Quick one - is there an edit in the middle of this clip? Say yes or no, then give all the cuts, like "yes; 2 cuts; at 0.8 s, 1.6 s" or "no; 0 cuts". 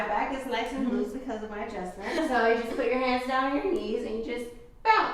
yes; 1 cut; at 2.2 s